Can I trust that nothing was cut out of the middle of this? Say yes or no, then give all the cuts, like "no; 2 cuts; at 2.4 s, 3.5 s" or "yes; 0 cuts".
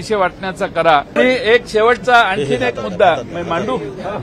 no; 1 cut; at 1.2 s